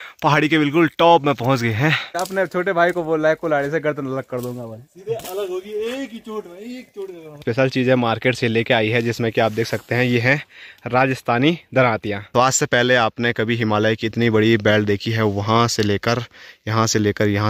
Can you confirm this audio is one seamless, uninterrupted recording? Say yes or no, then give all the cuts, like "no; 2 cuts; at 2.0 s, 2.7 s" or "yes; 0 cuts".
no; 3 cuts; at 2.2 s, 7.4 s, 12.2 s